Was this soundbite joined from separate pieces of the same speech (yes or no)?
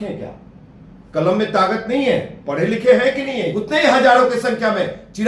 yes